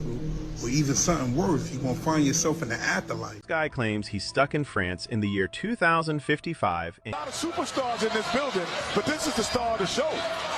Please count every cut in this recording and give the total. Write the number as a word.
two